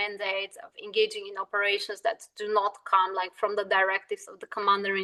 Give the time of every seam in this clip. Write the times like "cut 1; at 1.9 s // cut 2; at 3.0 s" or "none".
none